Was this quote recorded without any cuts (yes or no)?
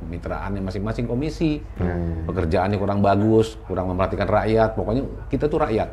yes